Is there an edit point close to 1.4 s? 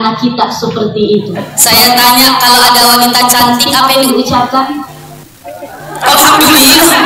yes; 1 cut; at 1.4 s

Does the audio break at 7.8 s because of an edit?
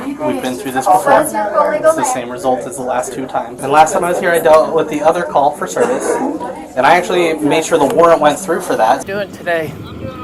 no; 2 cuts; at 3.5 s, 9.0 s

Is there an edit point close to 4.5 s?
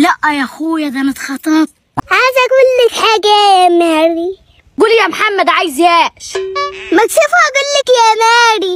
no; 1 cut; at 2.0 s

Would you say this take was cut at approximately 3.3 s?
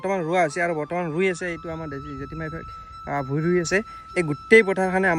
no; 0 cuts

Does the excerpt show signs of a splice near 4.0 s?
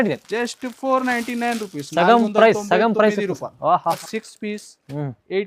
yes; 1 cut; at 4.0 s

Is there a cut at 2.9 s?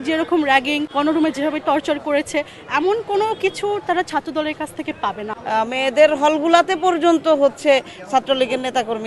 no; 2 cuts; at 0.9 s, 5.3 s

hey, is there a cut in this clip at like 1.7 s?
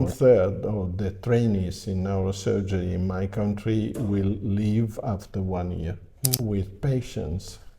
no; 1 cut; at 6.3 s

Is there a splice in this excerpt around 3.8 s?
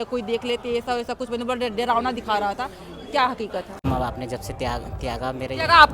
yes; 1 cut; at 3.8 s

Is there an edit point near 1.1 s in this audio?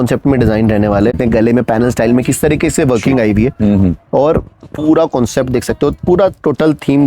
yes; 1 cut; at 1.1 s

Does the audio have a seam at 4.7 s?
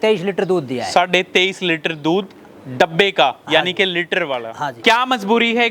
yes; 1 cut; at 4.7 s

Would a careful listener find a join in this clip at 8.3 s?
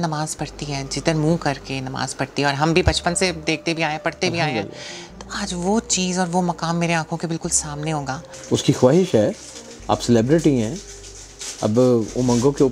yes; 1 cut; at 8.3 s

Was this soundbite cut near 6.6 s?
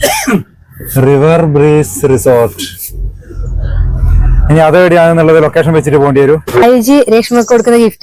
yes; 1 cut; at 6.6 s

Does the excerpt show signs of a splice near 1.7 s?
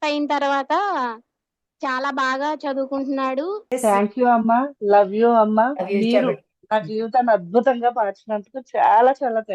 no; 1 cut; at 3.7 s

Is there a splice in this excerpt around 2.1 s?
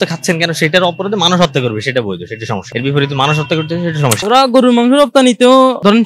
no; 1 cut; at 4.2 s

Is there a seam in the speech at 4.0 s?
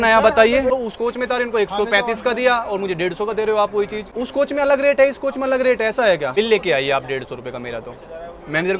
yes; 3 cuts; at 0.7 s, 4.0 s, 6.3 s

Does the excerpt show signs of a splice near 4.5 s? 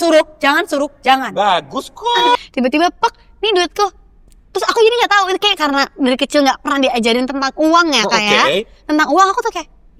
no; 1 cut; at 2.3 s

